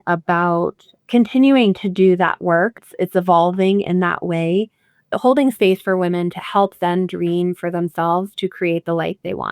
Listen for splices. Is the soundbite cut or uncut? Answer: cut